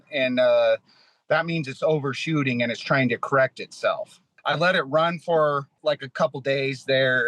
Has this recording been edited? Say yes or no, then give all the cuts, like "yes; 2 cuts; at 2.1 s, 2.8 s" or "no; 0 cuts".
yes; 2 cuts; at 4.3 s, 5.8 s